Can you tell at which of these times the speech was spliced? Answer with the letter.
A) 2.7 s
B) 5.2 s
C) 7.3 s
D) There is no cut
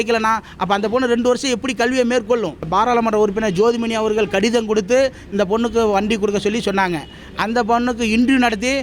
A